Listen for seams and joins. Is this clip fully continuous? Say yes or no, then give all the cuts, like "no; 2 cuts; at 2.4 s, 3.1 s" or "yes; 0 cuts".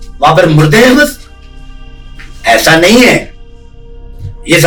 yes; 0 cuts